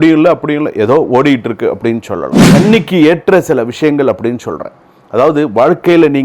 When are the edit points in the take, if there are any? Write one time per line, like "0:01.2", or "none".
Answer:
0:02.4